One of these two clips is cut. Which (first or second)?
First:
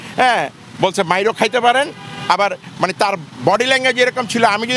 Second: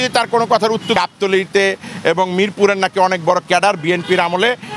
second